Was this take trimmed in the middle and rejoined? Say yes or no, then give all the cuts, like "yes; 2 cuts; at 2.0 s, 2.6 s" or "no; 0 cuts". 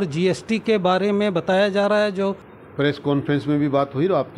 yes; 1 cut; at 2.5 s